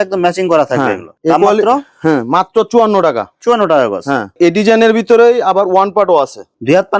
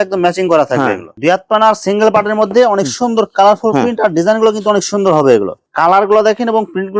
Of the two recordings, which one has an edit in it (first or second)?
second